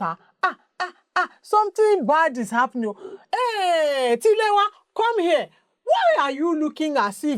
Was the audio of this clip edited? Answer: no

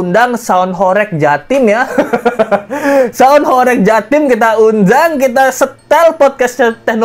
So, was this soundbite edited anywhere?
no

